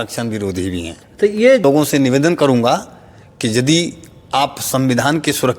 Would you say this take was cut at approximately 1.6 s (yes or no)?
yes